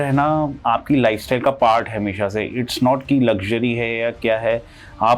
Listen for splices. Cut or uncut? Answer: uncut